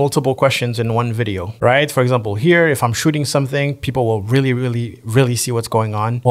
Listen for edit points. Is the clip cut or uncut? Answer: cut